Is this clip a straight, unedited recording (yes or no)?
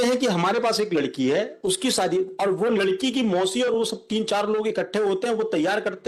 yes